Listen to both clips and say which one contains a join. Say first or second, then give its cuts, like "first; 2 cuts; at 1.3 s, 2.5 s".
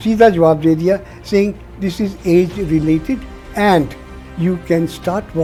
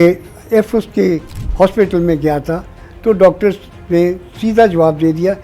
second; 1 cut; at 1.4 s